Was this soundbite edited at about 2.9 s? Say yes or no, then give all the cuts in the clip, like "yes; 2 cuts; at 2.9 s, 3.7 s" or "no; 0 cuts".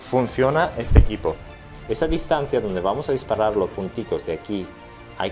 no; 1 cut; at 1.5 s